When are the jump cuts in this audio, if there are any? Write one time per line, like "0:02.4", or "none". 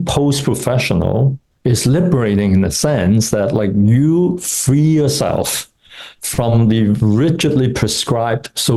none